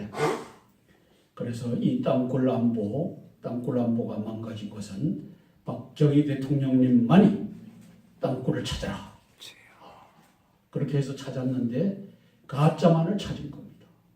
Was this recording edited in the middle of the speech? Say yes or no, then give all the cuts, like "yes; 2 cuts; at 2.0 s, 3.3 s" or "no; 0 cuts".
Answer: yes; 1 cut; at 5.3 s